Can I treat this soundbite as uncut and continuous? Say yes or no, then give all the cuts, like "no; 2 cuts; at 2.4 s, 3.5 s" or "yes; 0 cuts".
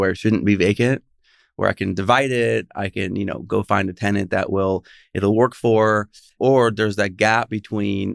no; 1 cut; at 6.2 s